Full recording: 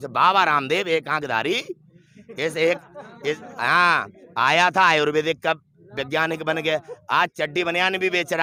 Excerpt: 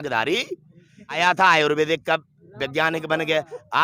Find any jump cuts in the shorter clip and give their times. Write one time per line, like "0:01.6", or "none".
0:01.2